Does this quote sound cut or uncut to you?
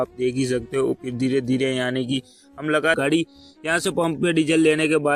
cut